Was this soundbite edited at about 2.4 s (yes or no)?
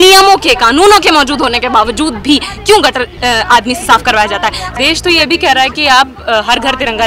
no